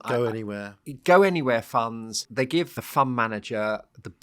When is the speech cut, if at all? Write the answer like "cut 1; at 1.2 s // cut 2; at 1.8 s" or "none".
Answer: cut 1; at 2.6 s